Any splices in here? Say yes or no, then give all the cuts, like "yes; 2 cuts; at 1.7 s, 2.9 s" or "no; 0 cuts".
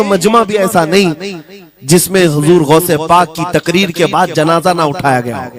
no; 0 cuts